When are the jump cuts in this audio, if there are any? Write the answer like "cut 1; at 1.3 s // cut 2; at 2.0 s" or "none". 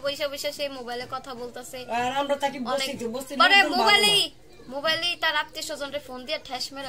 none